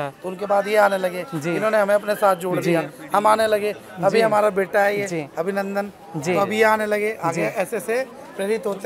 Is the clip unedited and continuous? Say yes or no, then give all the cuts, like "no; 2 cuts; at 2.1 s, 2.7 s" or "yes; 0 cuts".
yes; 0 cuts